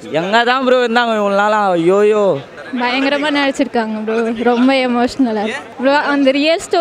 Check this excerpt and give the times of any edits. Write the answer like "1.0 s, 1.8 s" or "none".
2.6 s